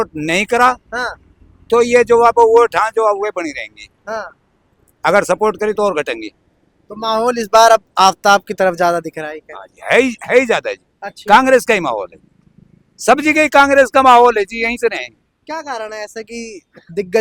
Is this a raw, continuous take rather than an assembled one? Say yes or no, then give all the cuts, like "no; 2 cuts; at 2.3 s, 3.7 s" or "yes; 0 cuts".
yes; 0 cuts